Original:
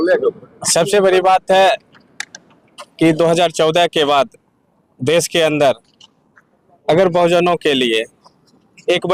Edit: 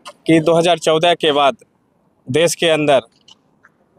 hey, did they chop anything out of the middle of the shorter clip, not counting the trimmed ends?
no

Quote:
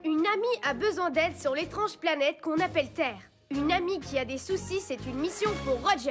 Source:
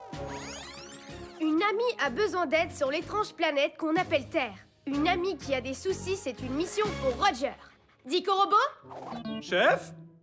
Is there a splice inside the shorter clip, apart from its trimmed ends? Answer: no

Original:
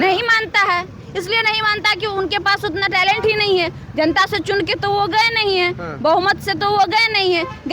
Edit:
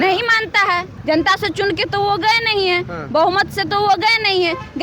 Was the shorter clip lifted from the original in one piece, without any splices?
no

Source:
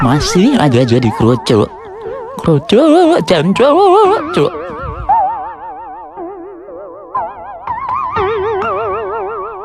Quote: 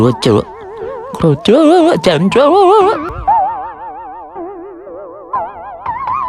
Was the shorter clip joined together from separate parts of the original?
yes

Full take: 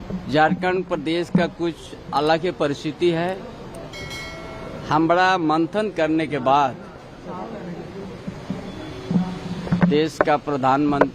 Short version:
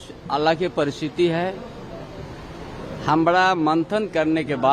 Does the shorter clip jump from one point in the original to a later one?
no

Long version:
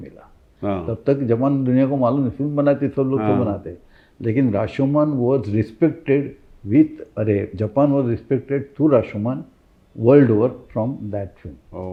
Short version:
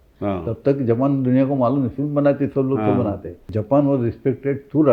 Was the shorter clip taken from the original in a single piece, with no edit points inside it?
no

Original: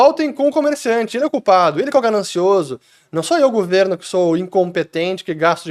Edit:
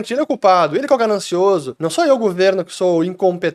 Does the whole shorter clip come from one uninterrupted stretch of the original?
no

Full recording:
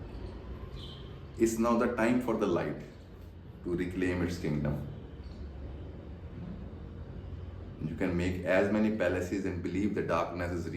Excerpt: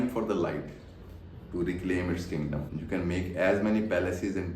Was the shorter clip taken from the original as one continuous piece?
no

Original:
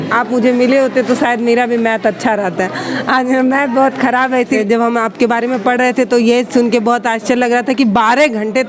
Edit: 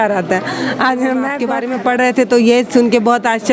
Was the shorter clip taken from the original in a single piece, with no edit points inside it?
no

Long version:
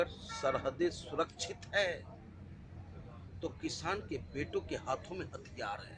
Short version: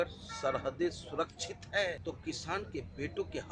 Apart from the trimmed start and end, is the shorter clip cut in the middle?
yes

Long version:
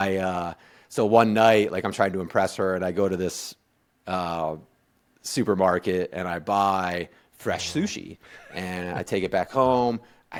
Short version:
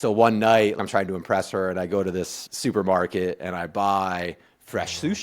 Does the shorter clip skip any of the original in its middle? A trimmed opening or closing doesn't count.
yes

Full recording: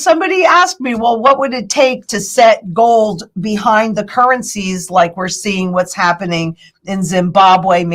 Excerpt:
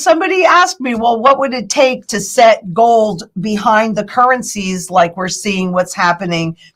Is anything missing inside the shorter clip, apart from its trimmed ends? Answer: no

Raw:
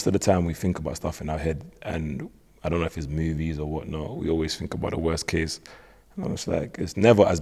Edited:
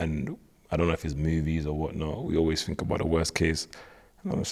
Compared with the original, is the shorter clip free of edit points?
yes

